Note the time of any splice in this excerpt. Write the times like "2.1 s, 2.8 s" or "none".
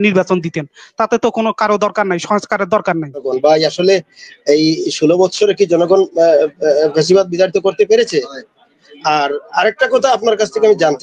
3.3 s